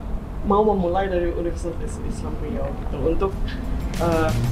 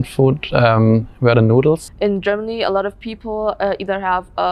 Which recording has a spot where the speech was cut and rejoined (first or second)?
second